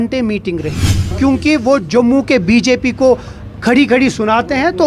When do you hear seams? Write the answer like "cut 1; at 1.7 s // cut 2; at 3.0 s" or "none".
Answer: cut 1; at 1.1 s